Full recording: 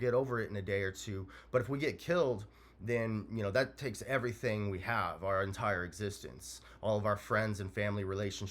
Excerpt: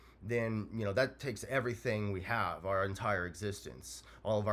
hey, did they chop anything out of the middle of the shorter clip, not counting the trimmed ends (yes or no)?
no